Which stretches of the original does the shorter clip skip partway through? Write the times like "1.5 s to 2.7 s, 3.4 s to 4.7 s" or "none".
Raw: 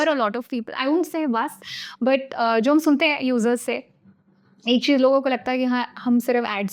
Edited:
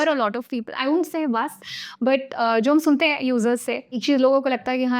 4.0 s to 4.8 s